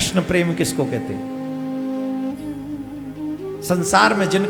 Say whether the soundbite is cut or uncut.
uncut